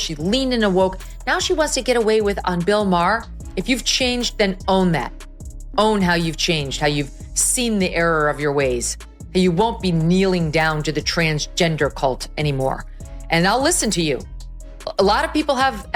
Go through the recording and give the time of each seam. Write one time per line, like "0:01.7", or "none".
0:03.4